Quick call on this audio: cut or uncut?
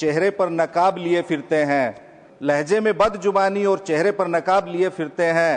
uncut